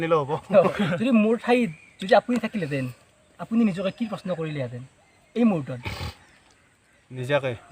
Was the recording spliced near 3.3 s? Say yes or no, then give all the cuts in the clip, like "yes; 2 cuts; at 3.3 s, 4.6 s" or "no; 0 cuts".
no; 1 cut; at 0.9 s